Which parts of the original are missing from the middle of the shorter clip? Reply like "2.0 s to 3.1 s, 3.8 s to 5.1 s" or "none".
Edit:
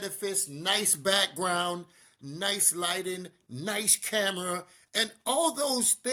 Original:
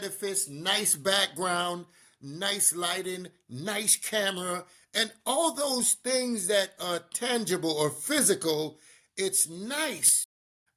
none

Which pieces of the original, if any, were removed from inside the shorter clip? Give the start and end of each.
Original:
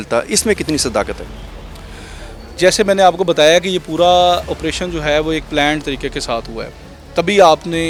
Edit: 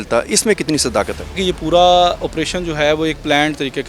1.4 s to 3.7 s

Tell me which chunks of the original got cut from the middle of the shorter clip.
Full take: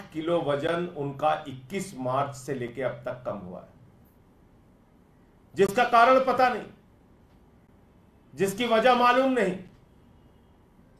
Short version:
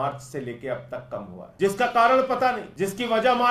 3.5 s to 5.4 s, 6.6 s to 8.3 s

